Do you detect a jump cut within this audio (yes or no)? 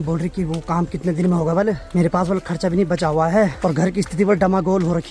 no